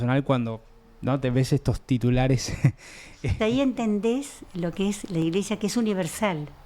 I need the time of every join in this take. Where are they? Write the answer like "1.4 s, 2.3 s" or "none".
3.4 s

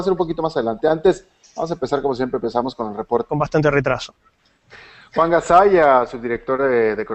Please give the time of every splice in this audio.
none

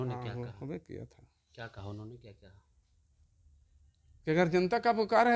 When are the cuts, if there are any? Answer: none

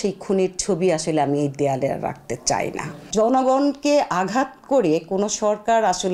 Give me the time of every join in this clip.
3.1 s

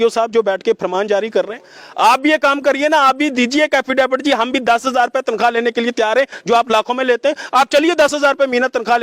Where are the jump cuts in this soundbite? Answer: none

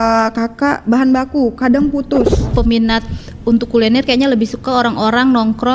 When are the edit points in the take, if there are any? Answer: 2.5 s

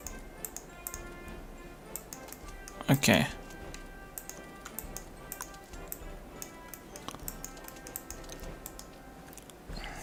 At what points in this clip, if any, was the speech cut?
none

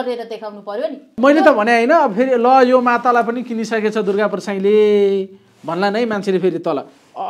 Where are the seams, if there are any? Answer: 1.1 s

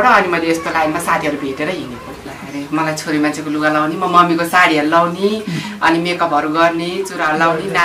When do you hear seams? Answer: 2.4 s

